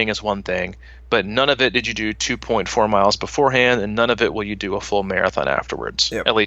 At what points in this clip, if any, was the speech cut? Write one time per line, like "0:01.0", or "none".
none

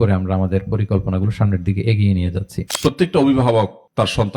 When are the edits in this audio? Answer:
0:02.7

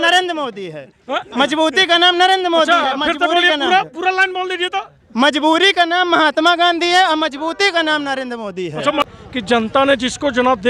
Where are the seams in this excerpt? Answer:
0:09.1

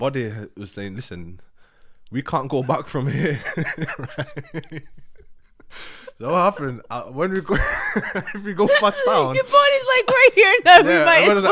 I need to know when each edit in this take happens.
none

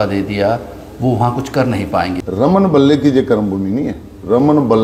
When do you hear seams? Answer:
0:02.2

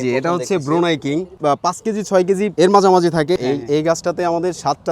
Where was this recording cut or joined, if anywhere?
0:01.4
0:02.5
0:03.4

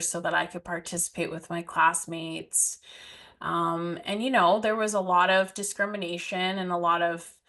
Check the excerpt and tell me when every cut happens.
none

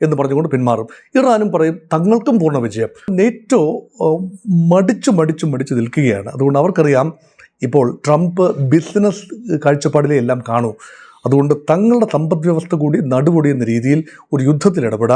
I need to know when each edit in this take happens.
0:03.1

